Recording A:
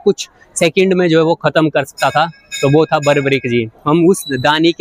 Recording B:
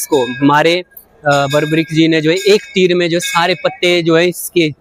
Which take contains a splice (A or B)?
A